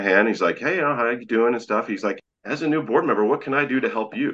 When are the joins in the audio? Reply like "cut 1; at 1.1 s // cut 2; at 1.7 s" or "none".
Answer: cut 1; at 2.2 s